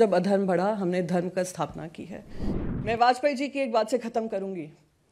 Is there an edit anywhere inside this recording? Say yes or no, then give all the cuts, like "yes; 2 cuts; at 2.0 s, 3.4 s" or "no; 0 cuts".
yes; 1 cut; at 2.5 s